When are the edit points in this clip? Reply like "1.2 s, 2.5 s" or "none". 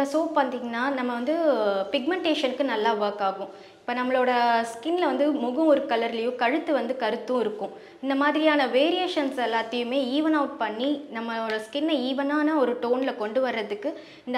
none